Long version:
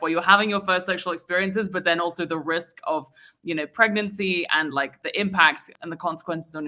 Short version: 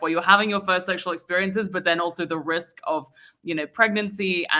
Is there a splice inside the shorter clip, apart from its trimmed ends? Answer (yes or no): no